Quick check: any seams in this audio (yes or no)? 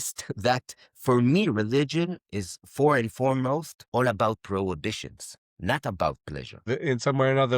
yes